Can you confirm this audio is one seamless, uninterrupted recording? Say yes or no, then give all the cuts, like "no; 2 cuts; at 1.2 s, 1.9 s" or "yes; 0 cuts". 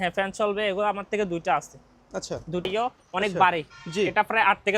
no; 1 cut; at 2.7 s